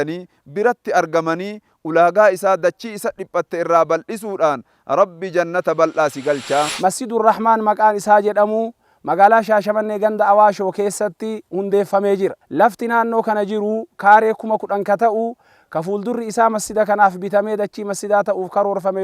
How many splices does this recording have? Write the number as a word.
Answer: two